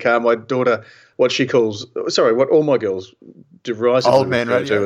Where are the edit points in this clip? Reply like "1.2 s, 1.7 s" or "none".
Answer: 1.1 s